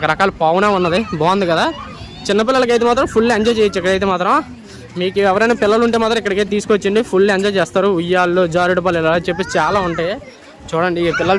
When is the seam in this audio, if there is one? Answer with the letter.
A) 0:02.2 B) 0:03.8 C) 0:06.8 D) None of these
D